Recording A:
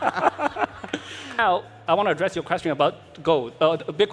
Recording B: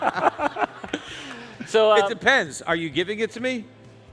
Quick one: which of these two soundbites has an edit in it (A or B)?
A